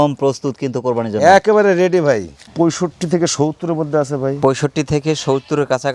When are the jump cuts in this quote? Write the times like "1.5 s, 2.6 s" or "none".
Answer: 2.4 s